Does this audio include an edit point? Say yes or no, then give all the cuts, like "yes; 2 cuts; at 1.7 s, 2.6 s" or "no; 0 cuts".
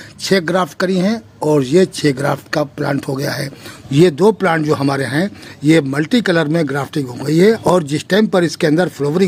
no; 0 cuts